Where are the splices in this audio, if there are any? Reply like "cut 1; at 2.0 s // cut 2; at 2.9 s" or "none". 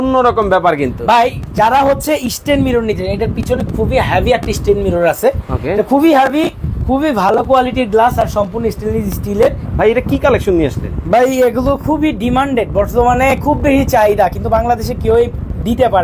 cut 1; at 9.6 s

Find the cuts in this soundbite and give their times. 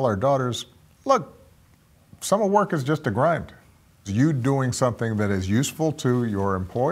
cut 1; at 3.8 s

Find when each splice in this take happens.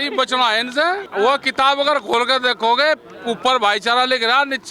cut 1; at 1.1 s

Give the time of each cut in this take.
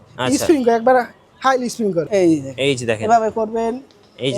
cut 1; at 2.0 s

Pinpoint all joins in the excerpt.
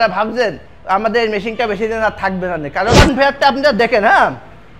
cut 1; at 3.0 s

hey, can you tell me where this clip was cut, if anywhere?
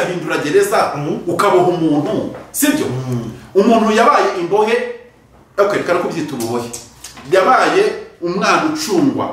none

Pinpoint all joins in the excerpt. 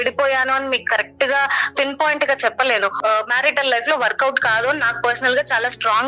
cut 1; at 3.0 s

